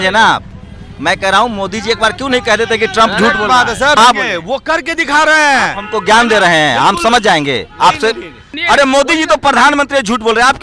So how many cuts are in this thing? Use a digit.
2